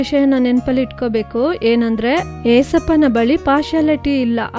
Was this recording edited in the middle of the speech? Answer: yes; 1 cut; at 2.3 s

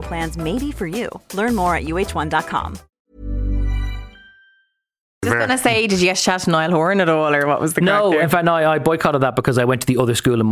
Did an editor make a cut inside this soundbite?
yes; 2 cuts; at 2.8 s, 5.2 s

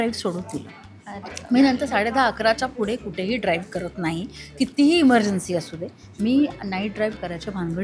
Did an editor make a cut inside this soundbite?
no; 0 cuts

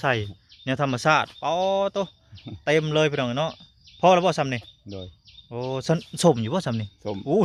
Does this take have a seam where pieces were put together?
no; 0 cuts

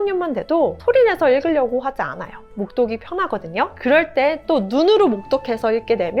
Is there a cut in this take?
no; 0 cuts

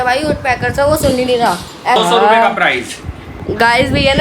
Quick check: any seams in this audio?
yes; 1 cut; at 2.0 s

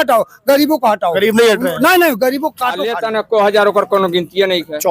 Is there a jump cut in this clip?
yes; 1 cut; at 2.9 s

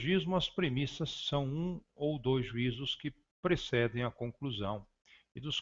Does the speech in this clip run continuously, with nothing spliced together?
yes; 0 cuts

